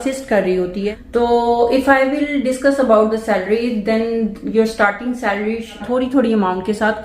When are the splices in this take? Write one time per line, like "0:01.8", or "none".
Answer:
0:00.9
0:05.8

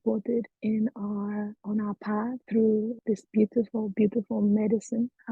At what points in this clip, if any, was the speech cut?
0:02.4
0:03.0

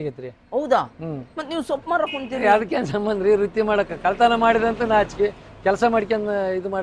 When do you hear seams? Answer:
none

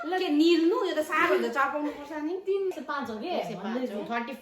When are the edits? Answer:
0:02.7

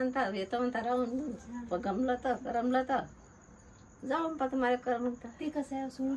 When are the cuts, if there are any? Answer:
none

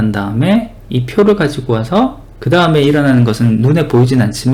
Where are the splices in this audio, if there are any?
none

